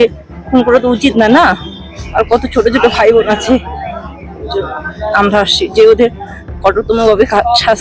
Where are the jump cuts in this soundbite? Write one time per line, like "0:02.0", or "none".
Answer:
none